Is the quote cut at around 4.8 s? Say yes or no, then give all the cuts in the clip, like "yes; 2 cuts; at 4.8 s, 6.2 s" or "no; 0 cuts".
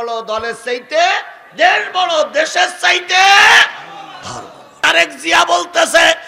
yes; 1 cut; at 4.8 s